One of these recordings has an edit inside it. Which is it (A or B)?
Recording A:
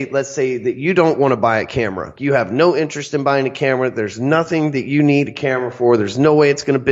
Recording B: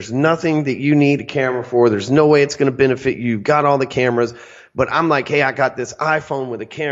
A